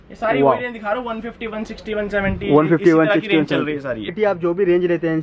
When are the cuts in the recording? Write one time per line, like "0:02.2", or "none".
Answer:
0:04.1